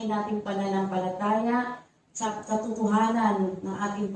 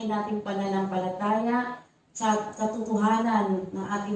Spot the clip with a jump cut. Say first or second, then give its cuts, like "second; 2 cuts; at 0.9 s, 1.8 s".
first; 1 cut; at 2.3 s